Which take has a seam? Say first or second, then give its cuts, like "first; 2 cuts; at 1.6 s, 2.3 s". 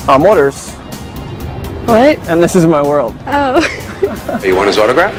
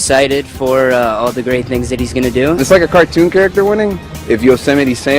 second; 2 cuts; at 2.6 s, 4.1 s